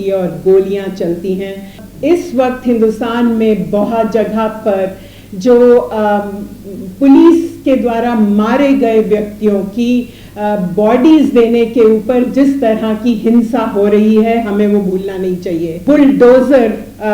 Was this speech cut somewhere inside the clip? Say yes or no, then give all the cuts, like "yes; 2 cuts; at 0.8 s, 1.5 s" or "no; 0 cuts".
yes; 2 cuts; at 1.8 s, 15.7 s